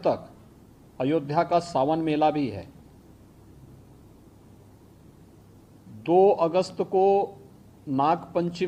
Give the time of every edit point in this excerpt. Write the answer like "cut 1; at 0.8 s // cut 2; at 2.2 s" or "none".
none